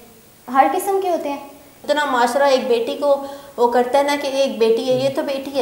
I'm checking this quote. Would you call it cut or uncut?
cut